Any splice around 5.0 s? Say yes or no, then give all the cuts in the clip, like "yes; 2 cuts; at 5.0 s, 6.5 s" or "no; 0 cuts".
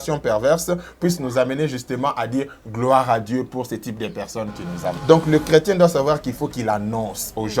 yes; 1 cut; at 5.0 s